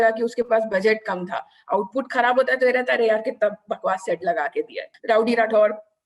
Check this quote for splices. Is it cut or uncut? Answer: cut